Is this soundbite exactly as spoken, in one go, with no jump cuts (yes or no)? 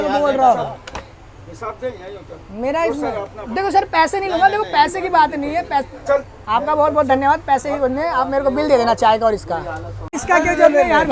no